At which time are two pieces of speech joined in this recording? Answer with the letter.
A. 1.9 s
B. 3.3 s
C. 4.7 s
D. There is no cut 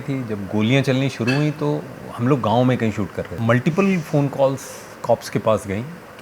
B